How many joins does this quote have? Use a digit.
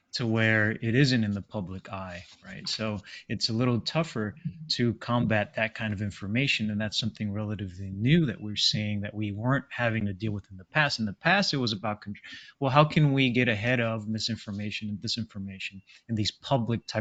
0